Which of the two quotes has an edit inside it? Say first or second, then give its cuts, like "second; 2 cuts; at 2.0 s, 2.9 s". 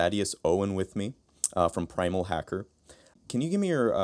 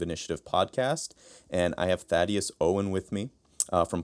first; 1 cut; at 3.1 s